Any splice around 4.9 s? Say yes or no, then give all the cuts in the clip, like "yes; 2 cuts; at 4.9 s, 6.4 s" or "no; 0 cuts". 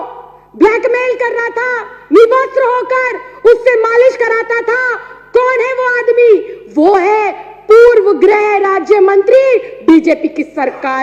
no; 0 cuts